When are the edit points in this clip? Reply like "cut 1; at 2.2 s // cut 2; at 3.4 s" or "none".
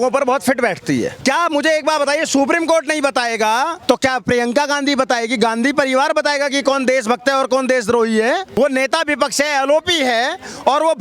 cut 1; at 1.1 s // cut 2; at 3.8 s // cut 3; at 8.5 s